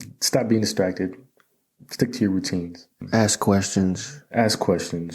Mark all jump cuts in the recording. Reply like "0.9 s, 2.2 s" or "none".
3.0 s